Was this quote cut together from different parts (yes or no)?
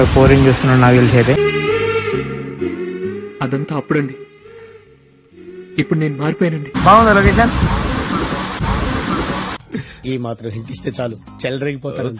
yes